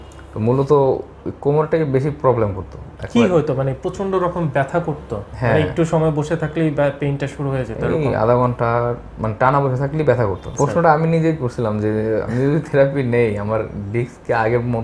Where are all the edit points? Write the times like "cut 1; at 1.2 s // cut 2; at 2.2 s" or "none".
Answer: cut 1; at 10.5 s